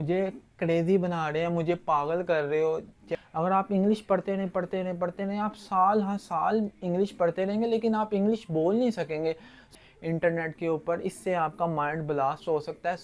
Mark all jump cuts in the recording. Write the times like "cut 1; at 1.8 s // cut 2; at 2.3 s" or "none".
cut 1; at 3.2 s // cut 2; at 9.7 s